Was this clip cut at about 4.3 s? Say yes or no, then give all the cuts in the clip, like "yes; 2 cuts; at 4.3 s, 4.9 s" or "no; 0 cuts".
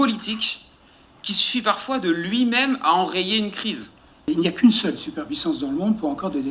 yes; 1 cut; at 4.3 s